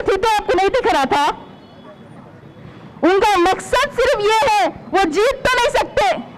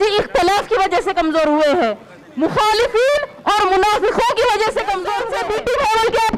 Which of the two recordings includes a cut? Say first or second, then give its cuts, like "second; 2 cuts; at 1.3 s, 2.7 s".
second; 1 cut; at 5.2 s